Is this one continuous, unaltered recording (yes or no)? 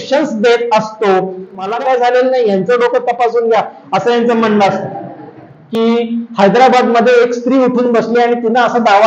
no